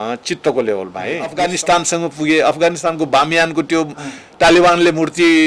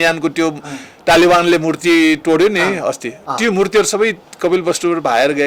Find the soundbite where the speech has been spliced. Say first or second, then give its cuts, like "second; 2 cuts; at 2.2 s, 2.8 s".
first; 1 cut; at 1.4 s